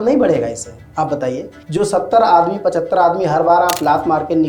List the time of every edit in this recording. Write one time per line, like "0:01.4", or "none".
0:01.5